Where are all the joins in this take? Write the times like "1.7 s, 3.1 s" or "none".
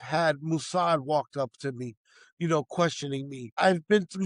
none